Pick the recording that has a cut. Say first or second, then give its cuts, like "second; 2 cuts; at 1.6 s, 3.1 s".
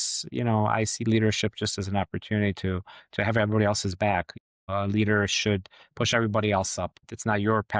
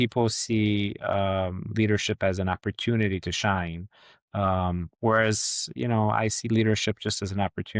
first; 1 cut; at 5.8 s